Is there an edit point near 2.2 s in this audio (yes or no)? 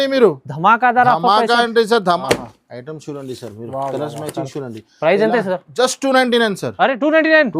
yes